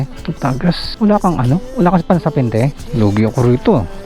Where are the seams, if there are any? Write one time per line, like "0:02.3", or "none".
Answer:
0:02.8